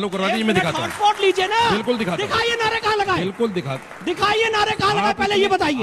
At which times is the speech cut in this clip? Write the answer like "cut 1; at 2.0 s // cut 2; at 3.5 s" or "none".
none

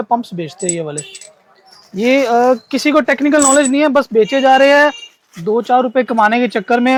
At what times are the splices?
none

